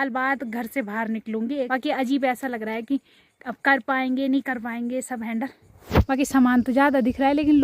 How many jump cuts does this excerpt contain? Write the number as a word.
two